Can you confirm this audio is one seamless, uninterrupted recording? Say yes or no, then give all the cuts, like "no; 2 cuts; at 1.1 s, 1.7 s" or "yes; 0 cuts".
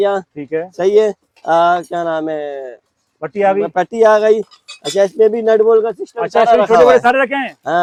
yes; 0 cuts